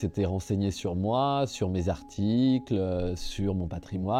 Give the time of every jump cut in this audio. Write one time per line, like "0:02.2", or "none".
none